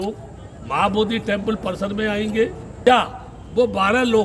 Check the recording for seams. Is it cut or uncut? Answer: cut